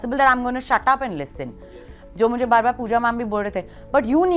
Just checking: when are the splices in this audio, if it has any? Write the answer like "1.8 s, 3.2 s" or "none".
none